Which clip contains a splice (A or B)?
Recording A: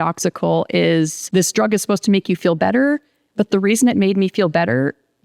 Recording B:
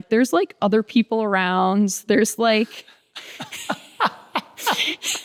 A